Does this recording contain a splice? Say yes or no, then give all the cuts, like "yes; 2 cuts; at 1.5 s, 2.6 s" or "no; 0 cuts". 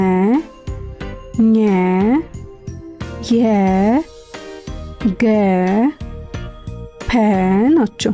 no; 0 cuts